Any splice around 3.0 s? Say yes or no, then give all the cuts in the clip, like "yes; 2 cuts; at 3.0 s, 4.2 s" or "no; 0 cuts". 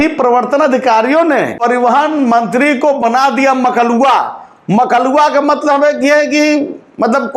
no; 1 cut; at 1.5 s